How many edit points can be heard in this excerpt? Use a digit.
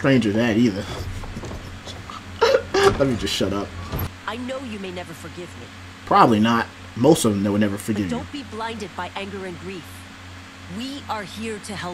1